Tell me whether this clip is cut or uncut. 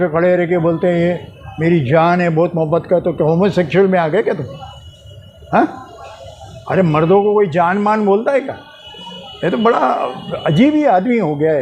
uncut